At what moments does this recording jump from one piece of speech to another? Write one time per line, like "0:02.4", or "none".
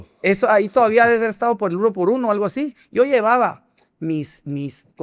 none